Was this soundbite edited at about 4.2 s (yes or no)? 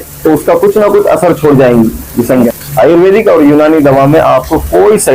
no